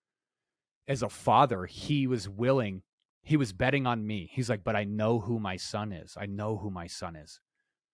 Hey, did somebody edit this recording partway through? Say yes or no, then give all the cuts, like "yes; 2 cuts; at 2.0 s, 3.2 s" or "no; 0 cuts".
no; 0 cuts